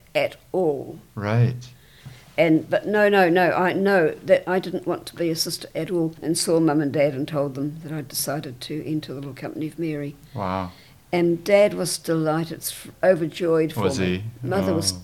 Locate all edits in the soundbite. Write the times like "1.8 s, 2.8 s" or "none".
2.1 s, 6.2 s